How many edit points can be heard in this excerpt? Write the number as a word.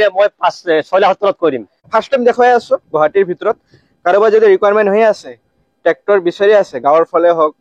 one